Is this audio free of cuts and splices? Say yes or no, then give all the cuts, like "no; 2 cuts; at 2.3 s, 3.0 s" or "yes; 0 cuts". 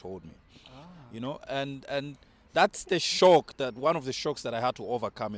yes; 0 cuts